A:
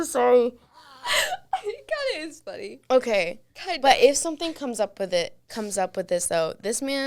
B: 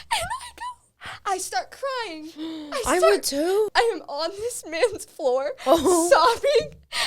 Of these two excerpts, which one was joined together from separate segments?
B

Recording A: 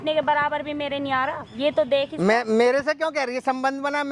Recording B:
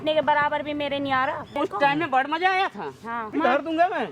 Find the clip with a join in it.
B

